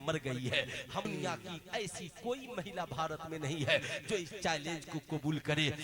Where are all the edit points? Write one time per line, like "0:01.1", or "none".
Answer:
0:01.0